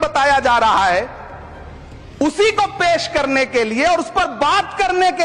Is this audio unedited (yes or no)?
yes